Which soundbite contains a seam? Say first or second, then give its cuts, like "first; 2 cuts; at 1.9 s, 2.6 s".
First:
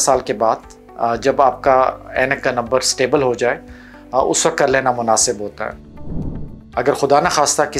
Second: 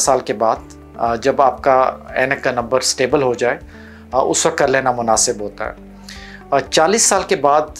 first; 1 cut; at 6.3 s